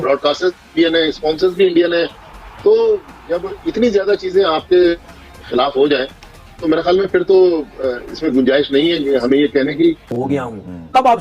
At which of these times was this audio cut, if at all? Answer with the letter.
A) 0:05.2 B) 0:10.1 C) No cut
B